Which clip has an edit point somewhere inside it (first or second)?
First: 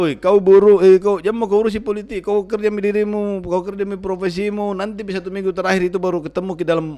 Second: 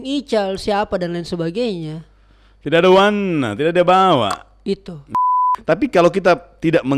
second